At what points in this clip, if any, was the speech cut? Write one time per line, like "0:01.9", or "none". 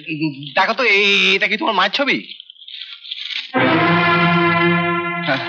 none